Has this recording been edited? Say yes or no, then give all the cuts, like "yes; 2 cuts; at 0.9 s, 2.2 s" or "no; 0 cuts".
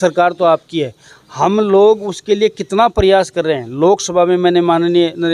no; 0 cuts